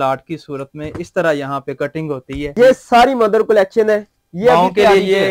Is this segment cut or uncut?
cut